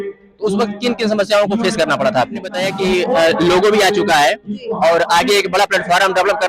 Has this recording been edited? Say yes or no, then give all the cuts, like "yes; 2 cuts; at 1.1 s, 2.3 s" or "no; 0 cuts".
yes; 1 cut; at 2.6 s